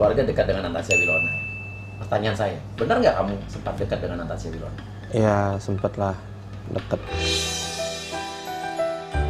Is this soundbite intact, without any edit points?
yes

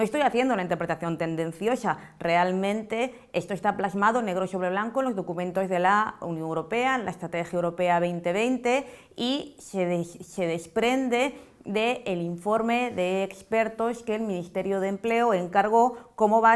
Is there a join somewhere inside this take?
yes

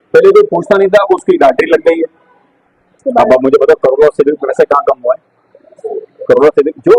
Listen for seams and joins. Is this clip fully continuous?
no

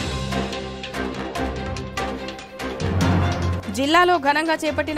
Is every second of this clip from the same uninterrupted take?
yes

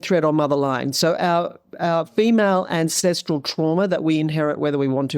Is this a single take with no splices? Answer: yes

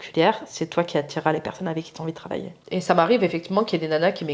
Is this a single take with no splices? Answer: no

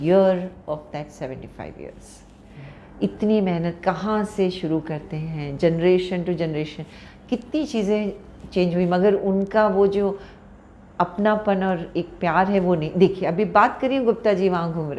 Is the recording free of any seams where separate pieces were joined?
yes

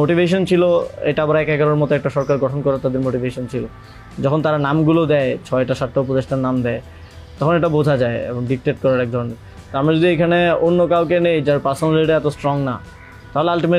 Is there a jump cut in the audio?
no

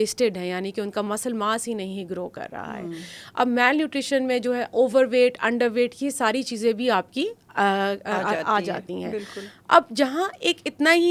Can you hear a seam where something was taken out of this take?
no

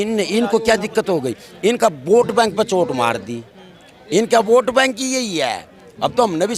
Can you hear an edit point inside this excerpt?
no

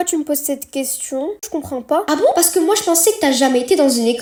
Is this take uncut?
yes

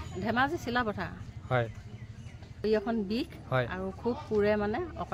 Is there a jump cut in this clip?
yes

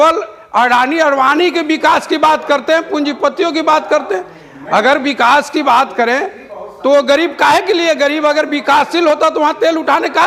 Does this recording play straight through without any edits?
yes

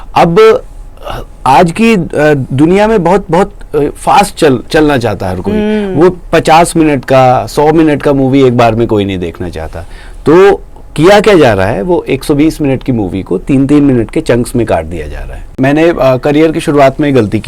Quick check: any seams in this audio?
yes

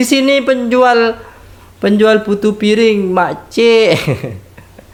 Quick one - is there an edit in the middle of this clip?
no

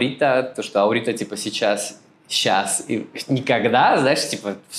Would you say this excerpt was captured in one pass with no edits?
yes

